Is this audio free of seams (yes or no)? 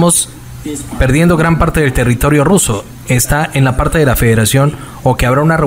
yes